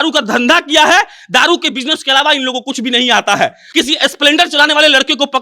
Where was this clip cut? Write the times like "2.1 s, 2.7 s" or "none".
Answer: 3.6 s

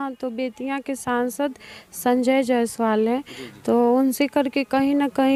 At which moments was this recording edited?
none

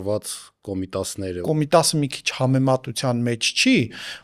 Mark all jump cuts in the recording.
1.4 s

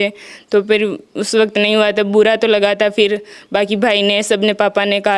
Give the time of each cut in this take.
none

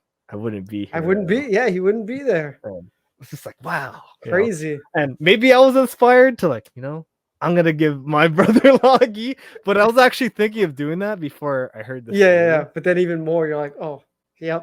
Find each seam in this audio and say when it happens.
none

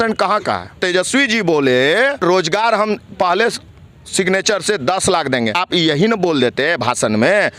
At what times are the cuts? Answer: 0.8 s, 2.2 s, 5.6 s

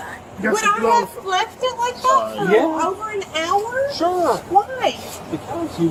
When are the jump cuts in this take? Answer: none

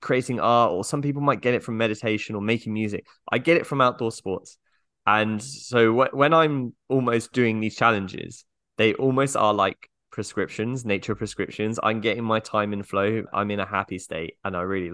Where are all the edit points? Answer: 13.3 s

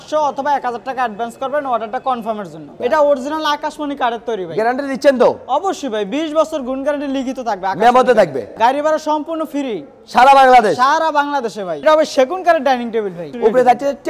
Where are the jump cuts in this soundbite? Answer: 2.7 s, 8.4 s, 11.8 s, 13.3 s

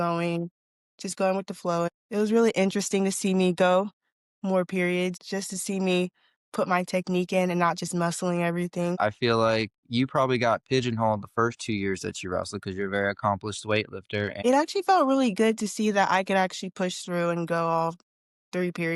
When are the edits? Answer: 1.9 s, 5.2 s, 9.0 s, 14.3 s

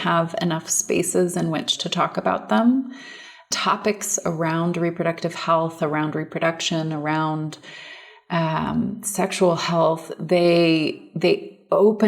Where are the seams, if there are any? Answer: 3.5 s

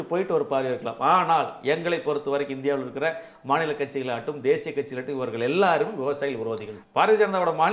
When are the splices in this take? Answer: 6.7 s

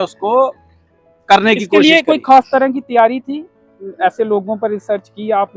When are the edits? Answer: none

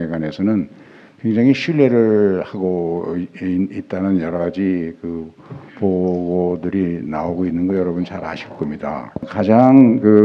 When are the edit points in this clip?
9.2 s

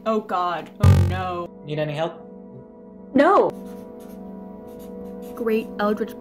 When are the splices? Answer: 1.5 s, 3.5 s

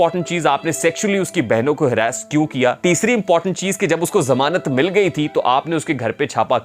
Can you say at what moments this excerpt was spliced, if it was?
2.8 s

